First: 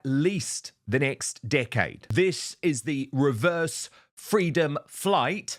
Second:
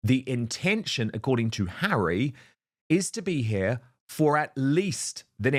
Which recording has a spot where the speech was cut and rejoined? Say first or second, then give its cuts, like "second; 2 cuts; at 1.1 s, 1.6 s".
first; 1 cut; at 2.0 s